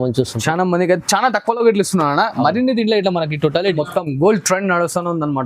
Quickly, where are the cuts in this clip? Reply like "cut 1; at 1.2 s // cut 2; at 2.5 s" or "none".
cut 1; at 3.7 s